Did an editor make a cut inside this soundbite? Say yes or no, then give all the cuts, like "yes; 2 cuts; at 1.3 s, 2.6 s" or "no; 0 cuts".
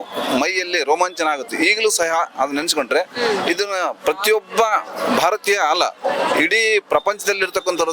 no; 0 cuts